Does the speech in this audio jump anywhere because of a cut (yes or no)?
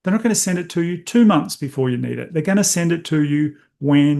no